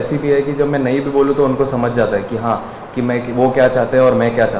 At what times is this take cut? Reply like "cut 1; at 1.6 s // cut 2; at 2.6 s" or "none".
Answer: none